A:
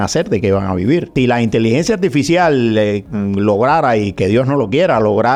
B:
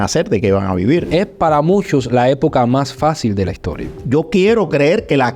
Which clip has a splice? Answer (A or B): B